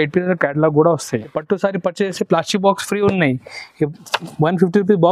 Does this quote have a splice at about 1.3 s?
yes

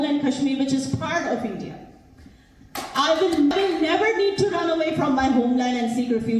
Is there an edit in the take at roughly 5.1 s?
no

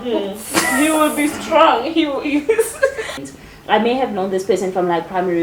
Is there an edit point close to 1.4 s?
no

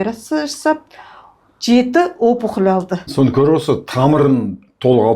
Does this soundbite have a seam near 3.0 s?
yes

